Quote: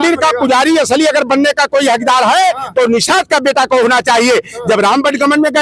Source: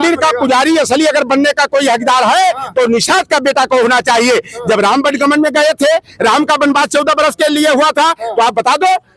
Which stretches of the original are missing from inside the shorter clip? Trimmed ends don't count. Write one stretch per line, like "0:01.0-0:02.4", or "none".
none